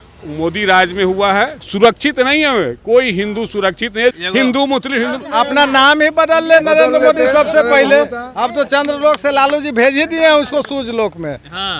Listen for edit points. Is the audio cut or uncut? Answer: cut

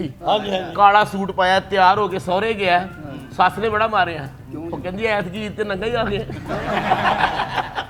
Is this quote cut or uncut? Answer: uncut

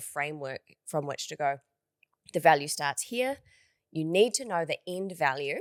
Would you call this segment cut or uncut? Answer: uncut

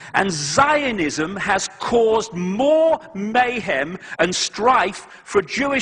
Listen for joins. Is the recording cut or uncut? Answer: cut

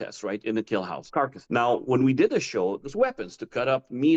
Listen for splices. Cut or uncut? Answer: cut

